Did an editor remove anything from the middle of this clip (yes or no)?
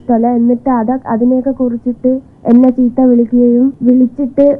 yes